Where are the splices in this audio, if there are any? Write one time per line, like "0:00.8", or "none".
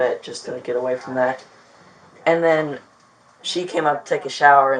none